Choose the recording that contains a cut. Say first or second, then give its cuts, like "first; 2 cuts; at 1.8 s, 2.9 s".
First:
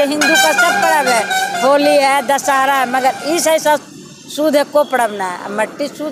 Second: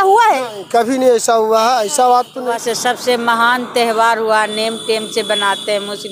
second; 1 cut; at 2.5 s